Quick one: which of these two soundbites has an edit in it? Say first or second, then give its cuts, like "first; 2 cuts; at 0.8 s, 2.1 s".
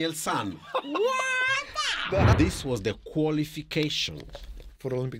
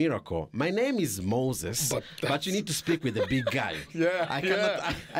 first; 1 cut; at 2.3 s